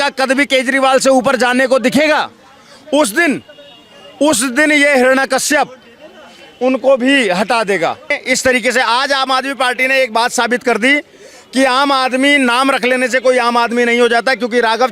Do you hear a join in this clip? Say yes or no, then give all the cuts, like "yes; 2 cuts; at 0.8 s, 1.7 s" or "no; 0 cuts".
yes; 1 cut; at 8.2 s